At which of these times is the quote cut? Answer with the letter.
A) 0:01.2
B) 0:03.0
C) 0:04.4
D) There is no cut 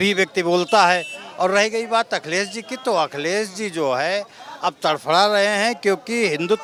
D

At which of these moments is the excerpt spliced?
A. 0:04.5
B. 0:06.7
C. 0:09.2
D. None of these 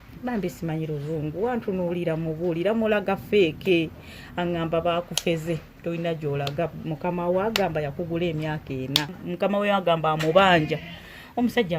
C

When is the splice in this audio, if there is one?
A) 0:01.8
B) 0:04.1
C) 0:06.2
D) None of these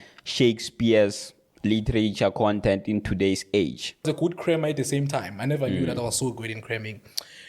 B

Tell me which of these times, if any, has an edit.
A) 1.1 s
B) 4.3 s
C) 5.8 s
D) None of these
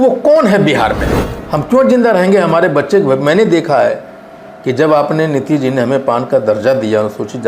A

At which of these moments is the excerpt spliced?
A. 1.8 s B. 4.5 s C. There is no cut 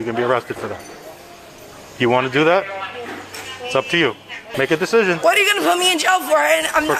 B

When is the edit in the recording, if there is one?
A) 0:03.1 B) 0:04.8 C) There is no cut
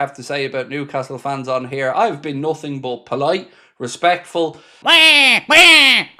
B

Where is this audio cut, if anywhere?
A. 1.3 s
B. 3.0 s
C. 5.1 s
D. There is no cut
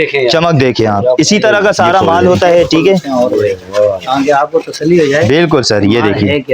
B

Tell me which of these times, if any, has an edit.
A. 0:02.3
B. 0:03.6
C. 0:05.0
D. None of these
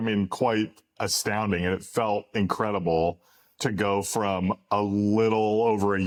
D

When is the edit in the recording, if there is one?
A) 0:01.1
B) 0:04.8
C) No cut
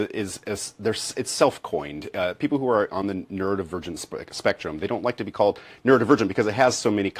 C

